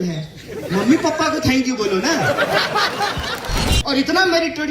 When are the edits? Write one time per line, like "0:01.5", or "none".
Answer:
0:03.6